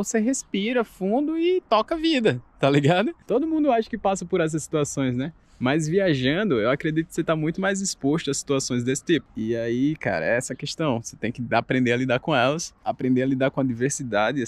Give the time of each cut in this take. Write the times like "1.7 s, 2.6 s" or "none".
none